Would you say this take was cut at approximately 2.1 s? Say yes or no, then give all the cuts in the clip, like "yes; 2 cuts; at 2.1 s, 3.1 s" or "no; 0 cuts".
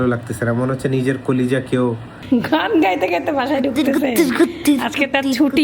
yes; 1 cut; at 2.1 s